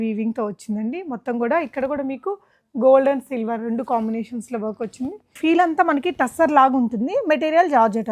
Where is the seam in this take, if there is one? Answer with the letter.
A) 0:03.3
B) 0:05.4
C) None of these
B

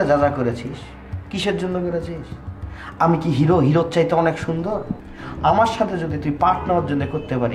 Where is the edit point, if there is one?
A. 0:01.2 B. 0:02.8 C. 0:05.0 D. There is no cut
C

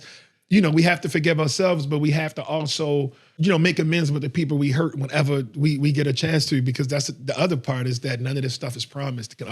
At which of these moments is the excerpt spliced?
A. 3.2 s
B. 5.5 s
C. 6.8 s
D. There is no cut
A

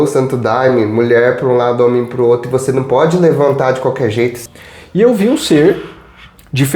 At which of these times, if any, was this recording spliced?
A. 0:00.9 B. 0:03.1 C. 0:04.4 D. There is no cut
C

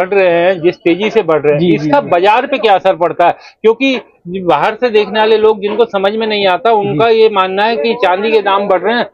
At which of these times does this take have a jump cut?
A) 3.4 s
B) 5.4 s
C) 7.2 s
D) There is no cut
D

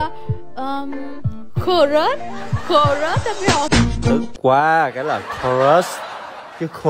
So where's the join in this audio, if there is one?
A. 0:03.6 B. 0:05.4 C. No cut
A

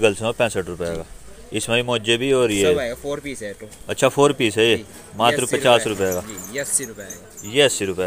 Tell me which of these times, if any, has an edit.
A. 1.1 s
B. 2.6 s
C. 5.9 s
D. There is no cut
D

